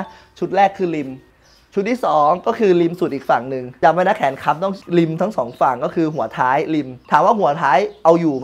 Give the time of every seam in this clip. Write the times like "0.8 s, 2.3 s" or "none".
3.6 s, 4.8 s